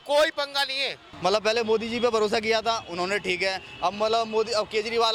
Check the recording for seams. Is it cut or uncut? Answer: cut